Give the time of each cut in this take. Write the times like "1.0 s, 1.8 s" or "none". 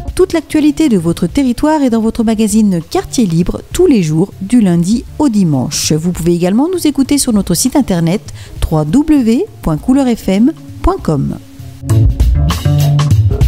11.7 s